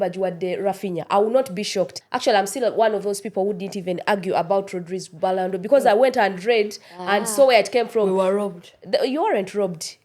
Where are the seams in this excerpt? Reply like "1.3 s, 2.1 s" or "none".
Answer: 2.0 s

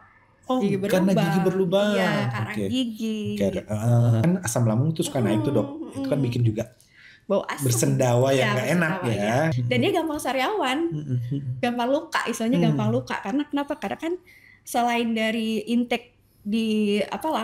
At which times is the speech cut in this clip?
4.2 s, 9.6 s

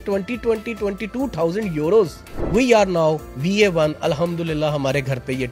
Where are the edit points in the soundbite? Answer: 2.4 s

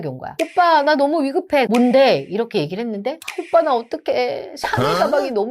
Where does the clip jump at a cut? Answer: 1.7 s

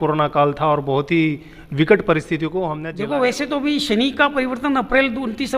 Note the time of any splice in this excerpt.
2.8 s

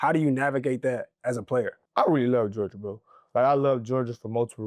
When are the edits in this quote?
1.8 s

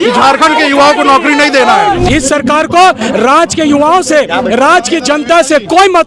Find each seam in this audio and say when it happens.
2.1 s

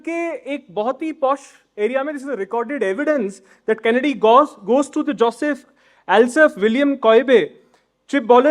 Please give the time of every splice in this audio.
none

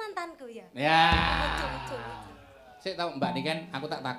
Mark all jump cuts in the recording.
none

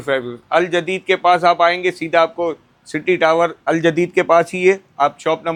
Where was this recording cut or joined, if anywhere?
none

